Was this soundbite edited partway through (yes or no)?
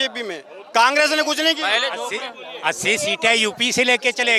no